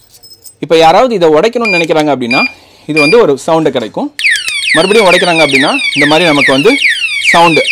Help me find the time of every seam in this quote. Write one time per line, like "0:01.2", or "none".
none